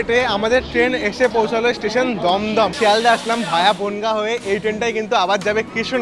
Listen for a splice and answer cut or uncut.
cut